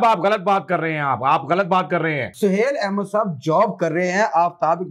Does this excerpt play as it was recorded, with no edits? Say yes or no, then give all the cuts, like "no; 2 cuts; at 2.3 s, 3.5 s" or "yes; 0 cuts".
no; 1 cut; at 2.4 s